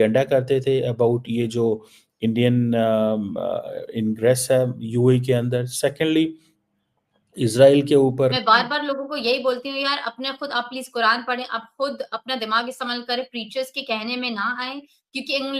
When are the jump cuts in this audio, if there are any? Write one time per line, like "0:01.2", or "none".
0:08.4